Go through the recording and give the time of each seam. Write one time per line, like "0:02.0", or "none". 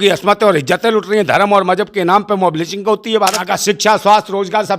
0:03.5